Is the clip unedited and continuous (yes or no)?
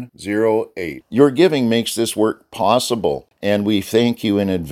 no